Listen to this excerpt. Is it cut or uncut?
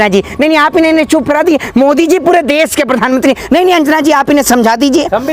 uncut